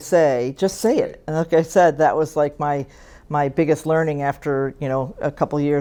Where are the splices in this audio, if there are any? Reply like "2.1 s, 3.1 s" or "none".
none